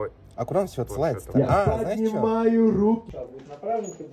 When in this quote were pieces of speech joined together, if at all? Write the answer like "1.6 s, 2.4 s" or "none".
3.1 s

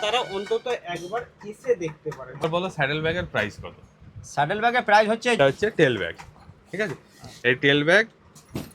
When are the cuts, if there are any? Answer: 2.4 s, 5.4 s

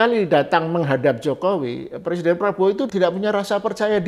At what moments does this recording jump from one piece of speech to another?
2.9 s

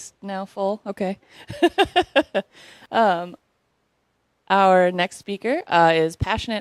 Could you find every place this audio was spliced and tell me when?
5.7 s

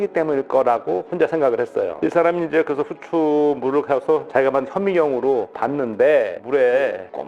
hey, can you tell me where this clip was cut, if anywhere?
1.9 s, 6.3 s

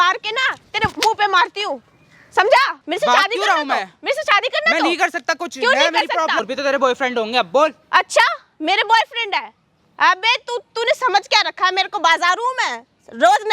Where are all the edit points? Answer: 2.8 s, 6.5 s

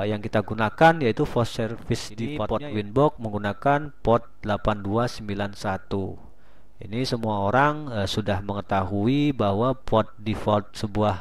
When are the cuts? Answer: 2.4 s

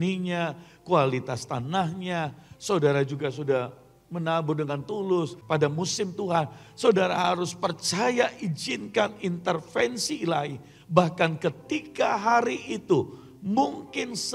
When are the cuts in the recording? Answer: 5.4 s

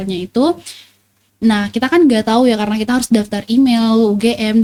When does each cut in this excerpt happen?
none

